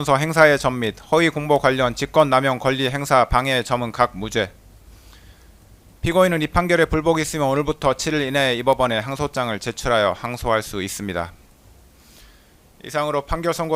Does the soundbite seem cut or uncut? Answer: uncut